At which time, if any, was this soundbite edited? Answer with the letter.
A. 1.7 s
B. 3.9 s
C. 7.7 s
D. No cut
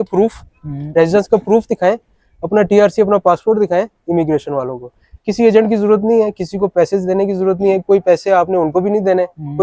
D